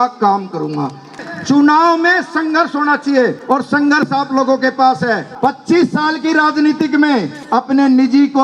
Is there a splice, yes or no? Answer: yes